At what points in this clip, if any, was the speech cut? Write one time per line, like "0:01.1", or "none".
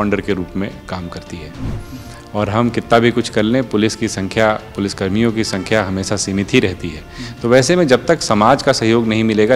0:01.7